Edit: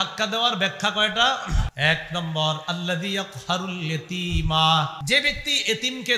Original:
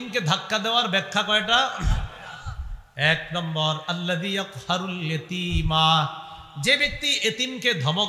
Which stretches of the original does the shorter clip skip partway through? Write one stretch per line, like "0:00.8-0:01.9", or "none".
0:02.0-0:02.9
0:06.2-0:06.5